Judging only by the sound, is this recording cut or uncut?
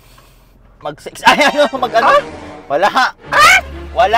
uncut